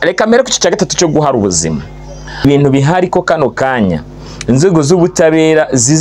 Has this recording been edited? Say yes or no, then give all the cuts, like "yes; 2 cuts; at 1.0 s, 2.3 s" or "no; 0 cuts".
yes; 1 cut; at 2.4 s